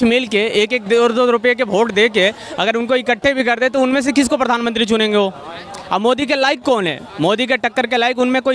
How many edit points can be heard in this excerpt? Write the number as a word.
zero